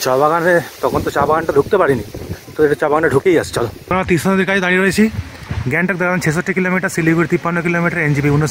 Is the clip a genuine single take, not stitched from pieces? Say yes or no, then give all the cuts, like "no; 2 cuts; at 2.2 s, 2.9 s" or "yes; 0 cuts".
no; 1 cut; at 3.8 s